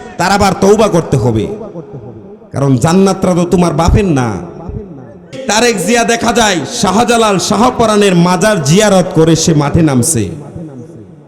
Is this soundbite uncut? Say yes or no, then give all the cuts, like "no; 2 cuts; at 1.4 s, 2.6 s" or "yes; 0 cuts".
no; 1 cut; at 5.4 s